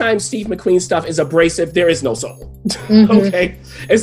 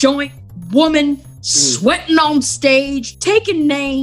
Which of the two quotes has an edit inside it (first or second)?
second